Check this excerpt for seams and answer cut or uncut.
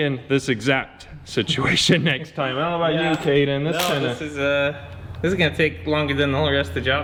uncut